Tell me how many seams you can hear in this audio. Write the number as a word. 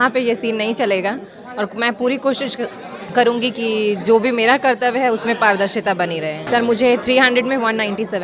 one